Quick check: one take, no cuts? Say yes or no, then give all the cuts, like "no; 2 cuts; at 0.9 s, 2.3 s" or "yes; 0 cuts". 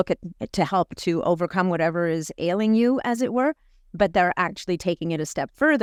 yes; 0 cuts